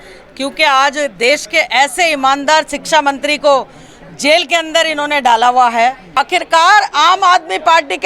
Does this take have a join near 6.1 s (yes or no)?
yes